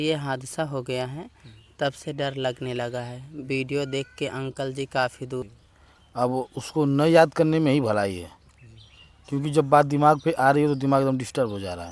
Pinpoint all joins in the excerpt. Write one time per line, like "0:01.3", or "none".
0:05.5